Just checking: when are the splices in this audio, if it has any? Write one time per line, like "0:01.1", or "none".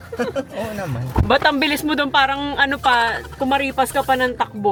none